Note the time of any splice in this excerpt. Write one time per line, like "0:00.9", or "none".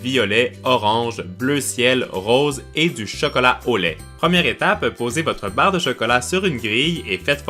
0:04.7